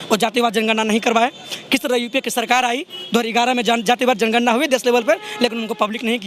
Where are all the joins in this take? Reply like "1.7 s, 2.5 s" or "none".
none